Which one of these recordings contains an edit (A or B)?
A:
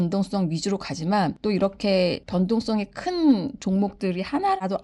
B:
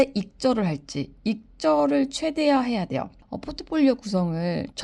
B